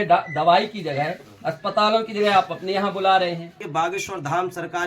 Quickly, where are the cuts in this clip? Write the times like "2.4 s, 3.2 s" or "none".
3.6 s